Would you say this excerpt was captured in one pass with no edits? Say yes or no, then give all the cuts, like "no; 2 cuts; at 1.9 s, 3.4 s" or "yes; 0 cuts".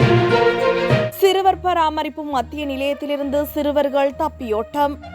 yes; 0 cuts